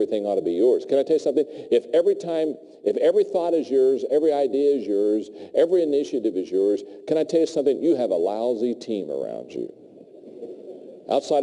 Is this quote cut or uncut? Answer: uncut